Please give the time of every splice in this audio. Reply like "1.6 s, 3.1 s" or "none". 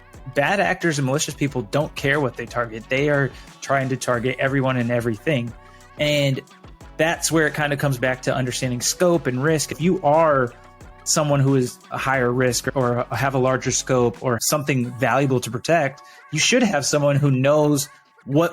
9.8 s